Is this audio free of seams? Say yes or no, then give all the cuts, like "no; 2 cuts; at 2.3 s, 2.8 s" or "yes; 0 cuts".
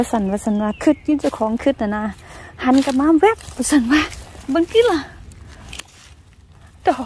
yes; 0 cuts